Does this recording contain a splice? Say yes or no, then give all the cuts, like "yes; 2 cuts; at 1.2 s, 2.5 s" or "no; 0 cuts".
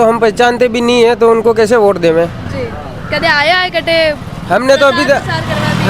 no; 0 cuts